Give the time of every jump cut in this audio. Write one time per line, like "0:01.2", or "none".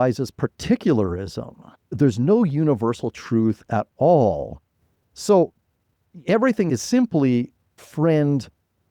0:01.9
0:06.7
0:07.9